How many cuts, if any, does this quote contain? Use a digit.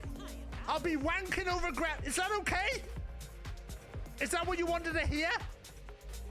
1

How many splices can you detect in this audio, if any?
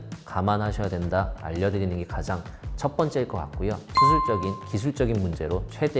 1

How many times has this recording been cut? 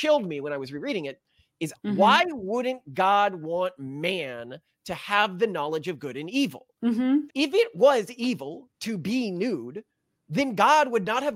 2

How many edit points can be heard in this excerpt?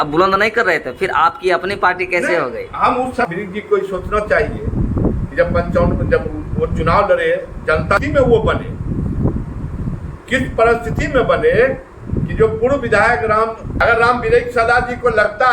3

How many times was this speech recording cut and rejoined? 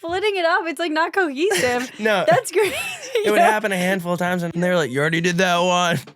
1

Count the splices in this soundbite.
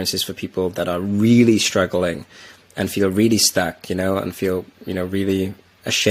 0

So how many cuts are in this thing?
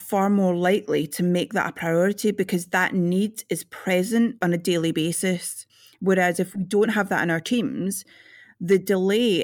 1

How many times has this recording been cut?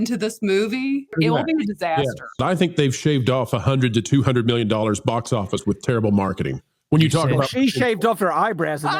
2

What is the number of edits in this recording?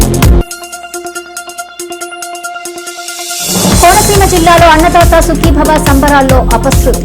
0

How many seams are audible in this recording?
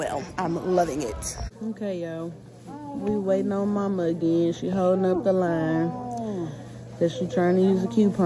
1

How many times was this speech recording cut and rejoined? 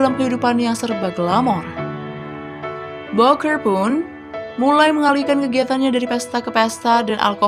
2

